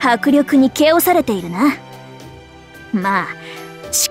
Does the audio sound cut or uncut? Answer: uncut